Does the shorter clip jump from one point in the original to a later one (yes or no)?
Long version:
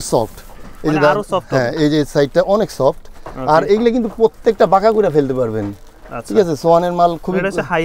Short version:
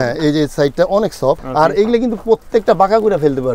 yes